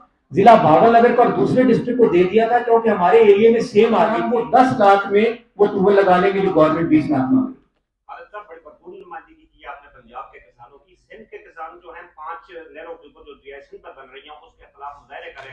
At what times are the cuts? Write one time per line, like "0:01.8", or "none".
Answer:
0:04.2